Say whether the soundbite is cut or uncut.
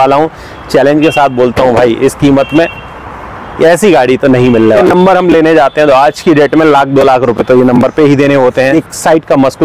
cut